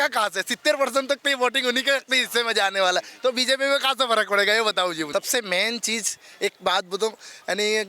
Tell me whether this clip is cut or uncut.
cut